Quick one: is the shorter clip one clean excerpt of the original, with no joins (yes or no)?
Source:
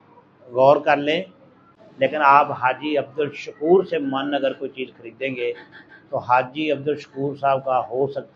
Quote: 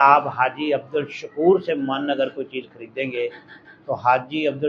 yes